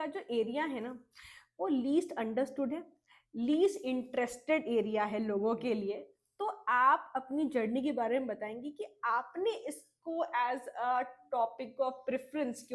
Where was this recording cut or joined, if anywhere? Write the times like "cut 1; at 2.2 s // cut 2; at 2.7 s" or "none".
none